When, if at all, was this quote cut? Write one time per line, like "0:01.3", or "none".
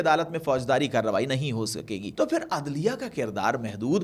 0:02.1